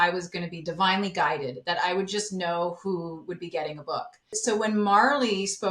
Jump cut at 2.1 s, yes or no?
no